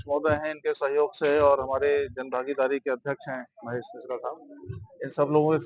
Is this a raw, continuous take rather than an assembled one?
yes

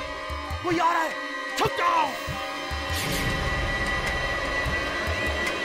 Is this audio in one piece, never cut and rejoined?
yes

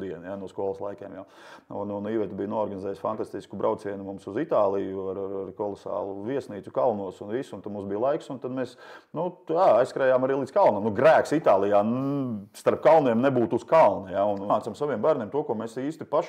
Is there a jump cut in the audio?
yes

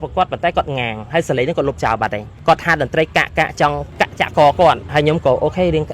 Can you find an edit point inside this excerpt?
yes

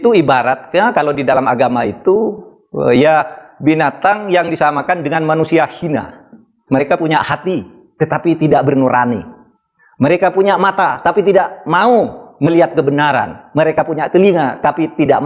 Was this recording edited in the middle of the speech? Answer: yes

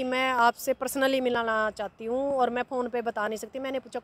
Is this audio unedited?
yes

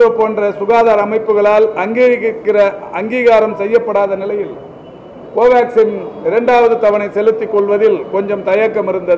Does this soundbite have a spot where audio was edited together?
no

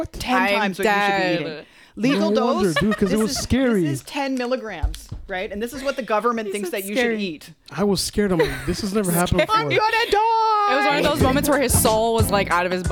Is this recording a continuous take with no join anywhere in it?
yes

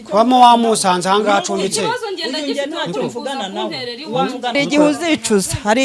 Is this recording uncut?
no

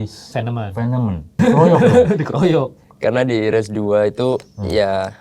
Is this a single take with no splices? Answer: no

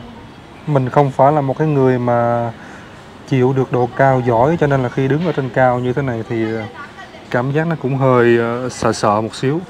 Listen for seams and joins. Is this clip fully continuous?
yes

